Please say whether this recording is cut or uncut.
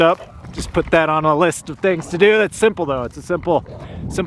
uncut